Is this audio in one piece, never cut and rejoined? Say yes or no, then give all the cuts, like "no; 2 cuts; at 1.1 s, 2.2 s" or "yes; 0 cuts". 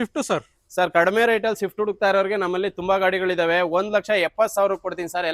yes; 0 cuts